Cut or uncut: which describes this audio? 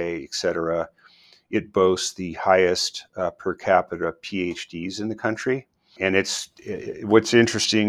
cut